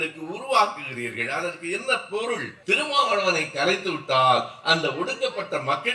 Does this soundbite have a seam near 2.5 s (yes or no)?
yes